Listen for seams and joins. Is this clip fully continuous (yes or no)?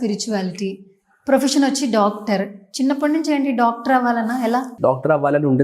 no